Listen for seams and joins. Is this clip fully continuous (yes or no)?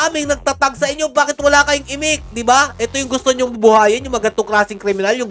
yes